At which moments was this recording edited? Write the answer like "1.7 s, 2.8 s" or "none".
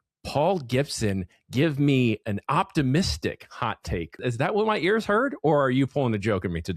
2.2 s, 4.2 s